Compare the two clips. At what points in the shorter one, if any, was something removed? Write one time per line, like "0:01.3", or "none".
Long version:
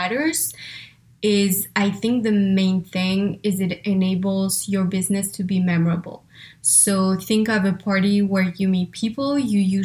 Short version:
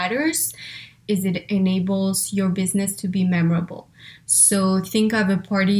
0:01.0